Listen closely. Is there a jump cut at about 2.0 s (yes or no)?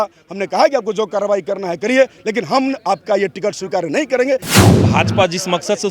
no